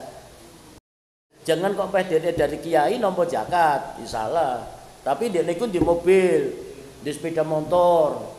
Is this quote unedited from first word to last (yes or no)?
no